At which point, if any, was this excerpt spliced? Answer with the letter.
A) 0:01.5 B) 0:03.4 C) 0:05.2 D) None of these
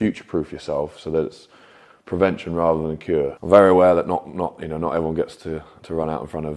B